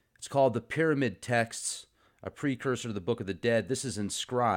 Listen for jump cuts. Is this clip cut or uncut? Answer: uncut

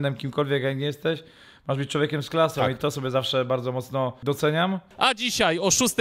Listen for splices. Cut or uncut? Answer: cut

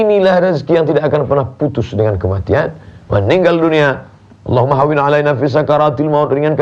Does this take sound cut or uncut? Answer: uncut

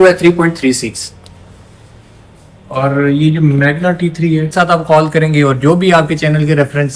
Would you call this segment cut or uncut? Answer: cut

